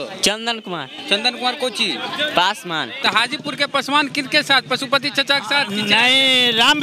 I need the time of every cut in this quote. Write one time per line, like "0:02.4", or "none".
0:03.0